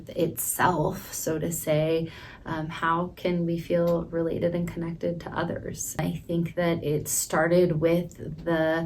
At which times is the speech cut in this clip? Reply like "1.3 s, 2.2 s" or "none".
6.0 s